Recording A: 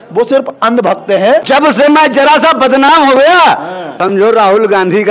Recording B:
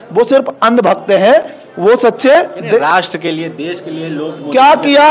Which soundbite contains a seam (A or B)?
A